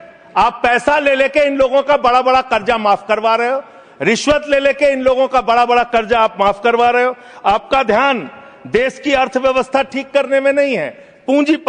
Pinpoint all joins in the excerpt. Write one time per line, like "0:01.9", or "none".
none